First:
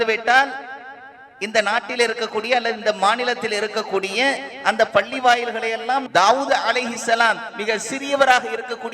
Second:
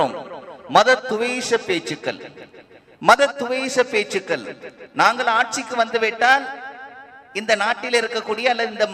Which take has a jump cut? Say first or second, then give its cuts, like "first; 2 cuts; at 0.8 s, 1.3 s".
first; 1 cut; at 6.0 s